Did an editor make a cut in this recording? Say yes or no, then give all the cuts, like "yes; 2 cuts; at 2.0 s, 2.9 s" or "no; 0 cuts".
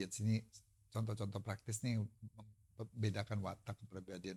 no; 0 cuts